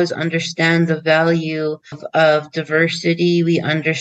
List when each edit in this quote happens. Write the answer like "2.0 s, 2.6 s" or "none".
2.0 s